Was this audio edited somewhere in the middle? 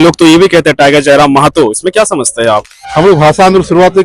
yes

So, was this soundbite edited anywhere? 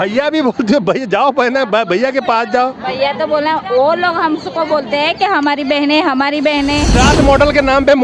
yes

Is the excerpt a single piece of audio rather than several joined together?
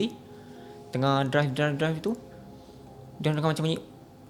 yes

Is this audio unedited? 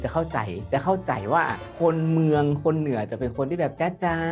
no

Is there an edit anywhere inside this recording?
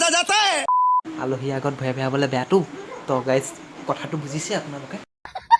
yes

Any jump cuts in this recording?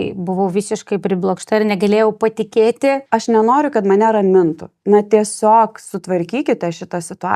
yes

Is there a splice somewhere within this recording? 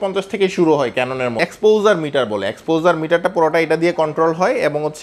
yes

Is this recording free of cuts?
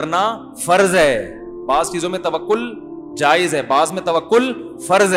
yes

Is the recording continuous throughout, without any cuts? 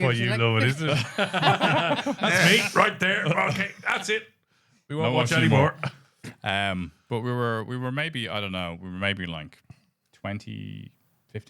yes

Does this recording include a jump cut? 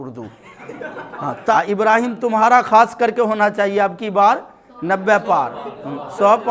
yes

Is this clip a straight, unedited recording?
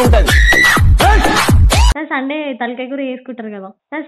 no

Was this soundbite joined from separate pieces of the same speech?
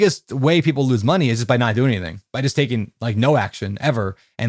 no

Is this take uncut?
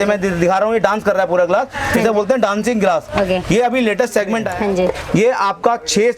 no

